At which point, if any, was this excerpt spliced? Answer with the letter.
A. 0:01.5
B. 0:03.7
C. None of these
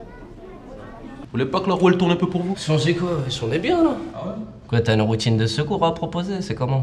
A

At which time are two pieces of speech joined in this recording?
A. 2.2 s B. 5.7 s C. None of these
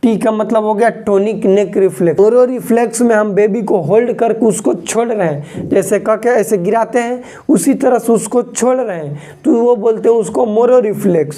A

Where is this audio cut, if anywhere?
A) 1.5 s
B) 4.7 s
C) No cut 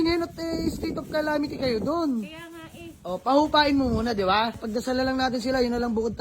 B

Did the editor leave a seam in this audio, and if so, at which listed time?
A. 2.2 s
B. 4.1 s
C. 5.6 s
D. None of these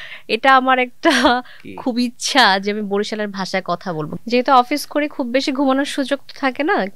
B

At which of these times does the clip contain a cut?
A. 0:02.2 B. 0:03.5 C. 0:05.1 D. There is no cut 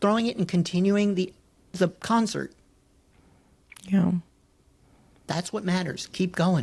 D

